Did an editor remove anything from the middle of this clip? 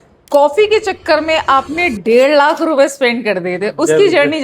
no; 0 cuts

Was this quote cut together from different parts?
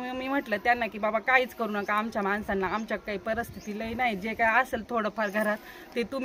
no; 0 cuts

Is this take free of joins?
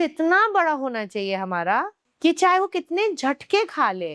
no; 1 cut; at 2.0 s

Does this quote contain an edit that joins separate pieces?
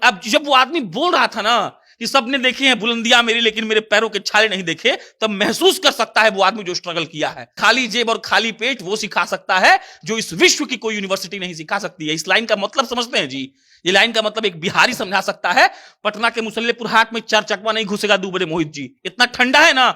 yes; 1 cut; at 7.5 s

